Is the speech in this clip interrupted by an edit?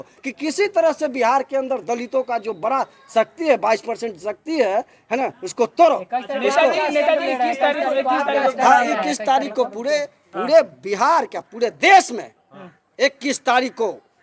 no; 0 cuts

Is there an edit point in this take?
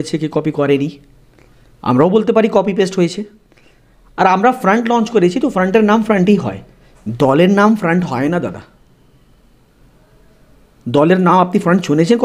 no; 0 cuts

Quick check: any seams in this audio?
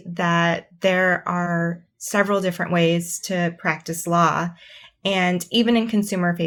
no; 0 cuts

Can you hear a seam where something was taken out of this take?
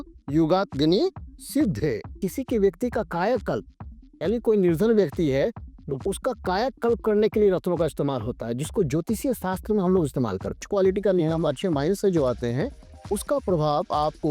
yes; 2 cuts; at 2.2 s, 10.6 s

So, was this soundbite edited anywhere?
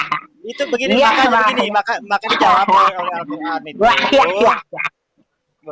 no; 0 cuts

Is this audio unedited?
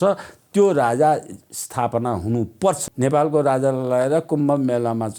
no; 1 cut; at 2.8 s

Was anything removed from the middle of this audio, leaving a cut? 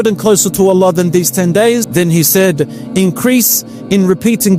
yes; 1 cut; at 1.9 s

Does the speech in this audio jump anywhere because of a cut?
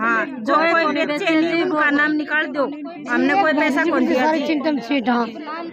no; 0 cuts

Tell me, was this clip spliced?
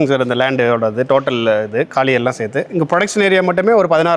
no; 0 cuts

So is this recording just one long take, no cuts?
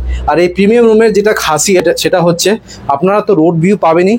no; 1 cut; at 1.8 s

